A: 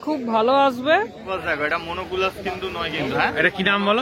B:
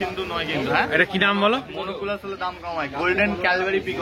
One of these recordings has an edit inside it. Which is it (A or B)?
A